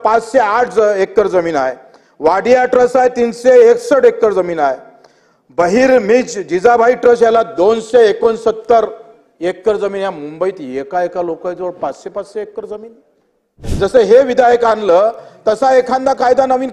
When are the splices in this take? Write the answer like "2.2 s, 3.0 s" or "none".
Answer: 13.6 s